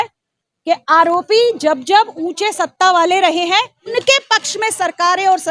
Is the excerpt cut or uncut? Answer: cut